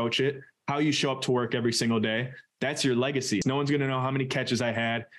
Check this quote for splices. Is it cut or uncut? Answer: cut